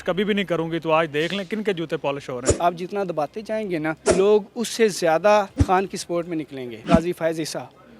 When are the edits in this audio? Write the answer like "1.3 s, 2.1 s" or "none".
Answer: 2.5 s, 4.0 s, 5.6 s, 6.9 s